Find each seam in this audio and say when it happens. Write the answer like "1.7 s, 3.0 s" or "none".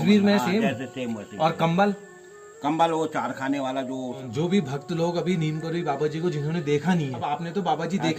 4.2 s, 7.2 s